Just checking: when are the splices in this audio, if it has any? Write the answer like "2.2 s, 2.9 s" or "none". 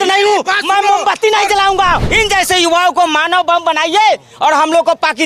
2.1 s